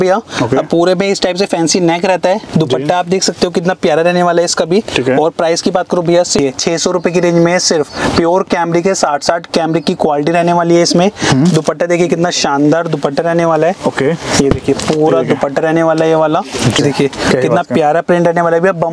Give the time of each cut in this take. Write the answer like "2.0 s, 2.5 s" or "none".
6.3 s, 16.8 s

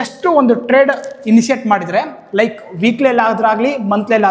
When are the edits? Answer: none

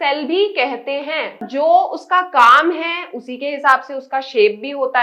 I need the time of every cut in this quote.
1.5 s

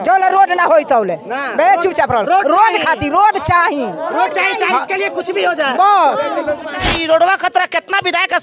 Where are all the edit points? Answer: 6.9 s

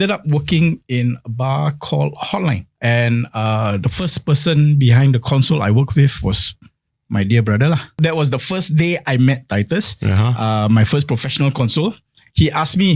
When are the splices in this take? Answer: 2.7 s, 8.0 s

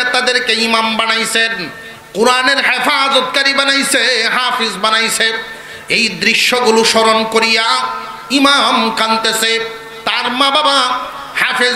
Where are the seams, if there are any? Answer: none

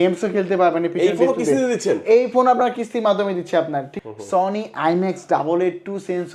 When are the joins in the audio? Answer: 3.9 s

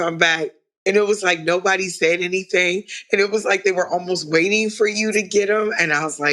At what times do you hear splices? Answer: none

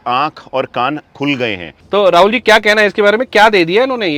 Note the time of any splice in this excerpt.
1.7 s

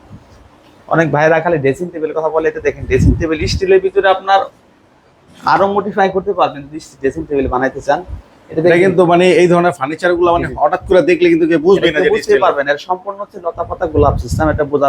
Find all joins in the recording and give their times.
none

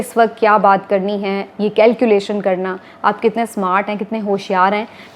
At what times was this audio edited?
none

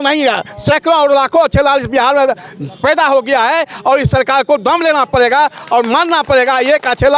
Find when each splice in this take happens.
none

